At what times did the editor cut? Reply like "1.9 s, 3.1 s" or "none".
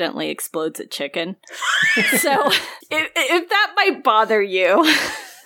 none